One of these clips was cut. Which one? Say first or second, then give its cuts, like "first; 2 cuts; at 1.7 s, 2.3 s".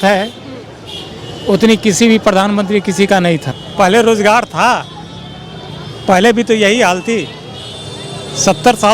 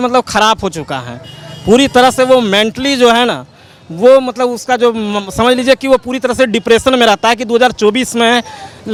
first; 1 cut; at 3.5 s